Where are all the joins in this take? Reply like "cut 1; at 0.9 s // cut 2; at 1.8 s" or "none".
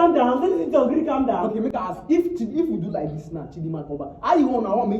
none